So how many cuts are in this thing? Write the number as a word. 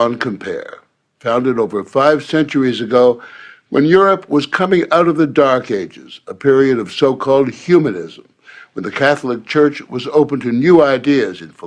one